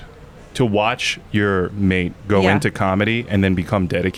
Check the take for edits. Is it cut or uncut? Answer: uncut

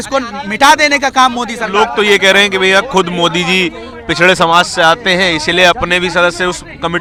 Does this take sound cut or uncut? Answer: uncut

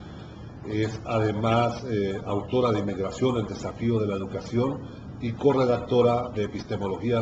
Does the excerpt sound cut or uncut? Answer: cut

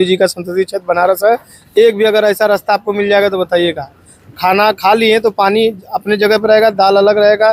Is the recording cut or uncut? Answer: uncut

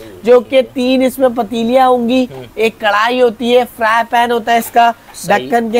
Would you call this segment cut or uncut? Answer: uncut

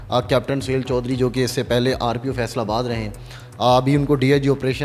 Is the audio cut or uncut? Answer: uncut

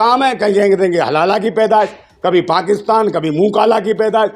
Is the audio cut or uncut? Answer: uncut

